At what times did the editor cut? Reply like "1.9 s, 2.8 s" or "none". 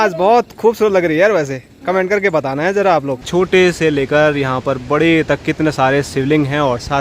3.3 s